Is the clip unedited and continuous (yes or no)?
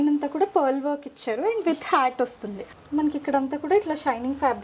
no